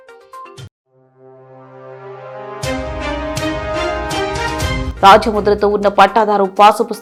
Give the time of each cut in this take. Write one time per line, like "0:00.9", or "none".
none